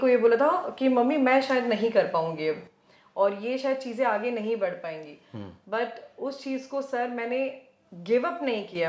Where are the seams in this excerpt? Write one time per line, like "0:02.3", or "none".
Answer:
none